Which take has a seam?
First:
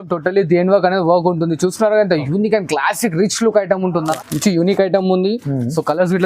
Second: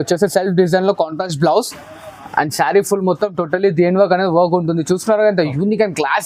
first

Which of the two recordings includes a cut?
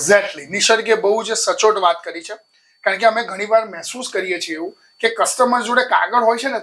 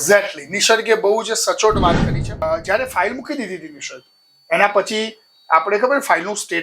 second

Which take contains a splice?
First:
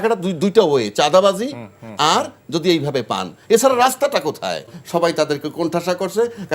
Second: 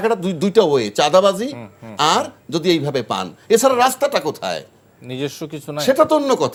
first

